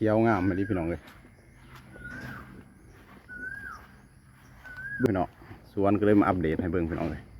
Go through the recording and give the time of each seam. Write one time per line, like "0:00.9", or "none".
0:05.1